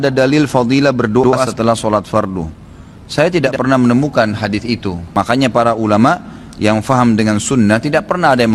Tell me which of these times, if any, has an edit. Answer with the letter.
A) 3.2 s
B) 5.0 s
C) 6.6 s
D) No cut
B